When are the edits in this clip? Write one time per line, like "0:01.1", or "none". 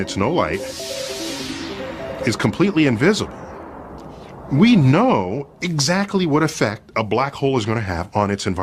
0:06.7